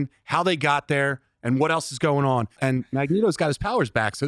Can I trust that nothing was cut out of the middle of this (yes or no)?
no